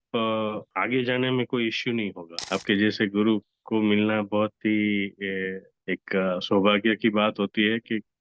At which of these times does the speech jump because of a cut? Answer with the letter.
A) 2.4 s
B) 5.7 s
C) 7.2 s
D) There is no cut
A